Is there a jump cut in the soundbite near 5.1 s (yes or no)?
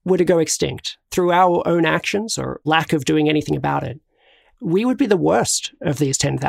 no